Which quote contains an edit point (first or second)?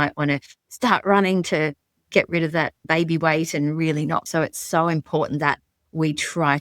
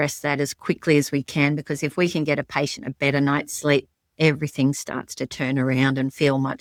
first